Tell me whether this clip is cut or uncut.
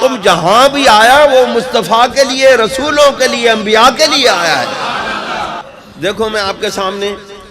cut